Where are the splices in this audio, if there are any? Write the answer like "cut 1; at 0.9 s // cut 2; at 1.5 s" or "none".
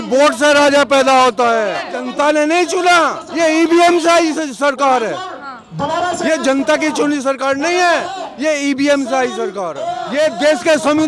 cut 1; at 1.9 s // cut 2; at 10.0 s

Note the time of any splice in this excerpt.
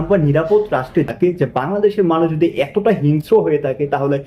cut 1; at 1.1 s

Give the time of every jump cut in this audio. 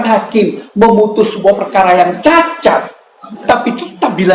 none

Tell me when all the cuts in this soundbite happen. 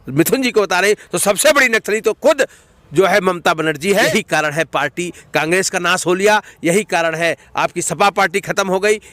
cut 1; at 4.1 s

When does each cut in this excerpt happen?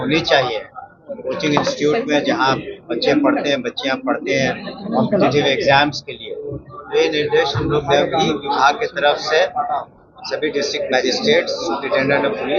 none

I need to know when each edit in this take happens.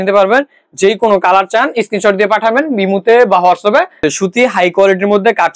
cut 1; at 4.0 s

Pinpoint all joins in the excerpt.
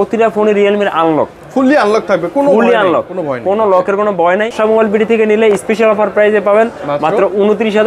cut 1; at 4.5 s

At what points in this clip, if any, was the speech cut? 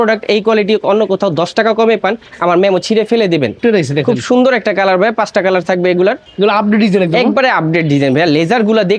cut 1; at 3.6 s // cut 2; at 6.3 s

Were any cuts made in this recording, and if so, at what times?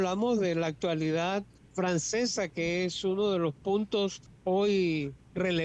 cut 1; at 1.6 s // cut 2; at 4.3 s

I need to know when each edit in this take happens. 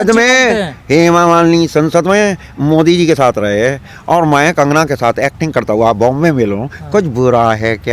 none

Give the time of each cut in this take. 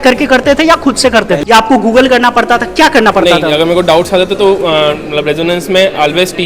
cut 1; at 1.4 s

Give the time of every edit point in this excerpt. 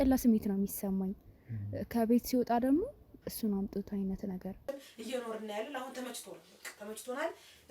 cut 1; at 4.6 s

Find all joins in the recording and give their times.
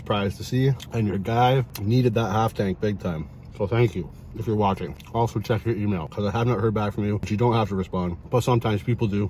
cut 1; at 0.8 s // cut 2; at 1.7 s // cut 3; at 3.4 s // cut 4; at 5.0 s // cut 5; at 6.1 s // cut 6; at 7.2 s // cut 7; at 8.2 s

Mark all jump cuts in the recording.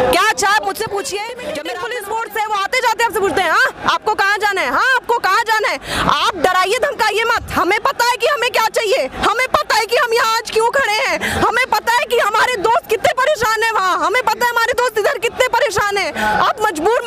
cut 1; at 1.7 s

